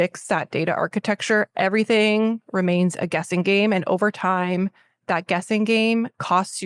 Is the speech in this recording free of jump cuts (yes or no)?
yes